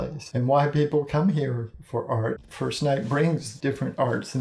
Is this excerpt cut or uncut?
cut